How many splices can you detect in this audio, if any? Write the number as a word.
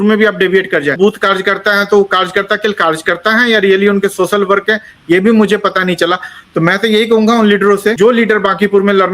two